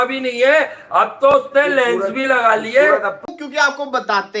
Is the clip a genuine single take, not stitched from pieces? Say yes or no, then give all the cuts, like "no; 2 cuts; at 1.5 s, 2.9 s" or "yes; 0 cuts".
no; 1 cut; at 3.2 s